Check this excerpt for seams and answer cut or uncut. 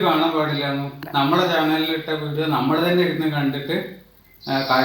cut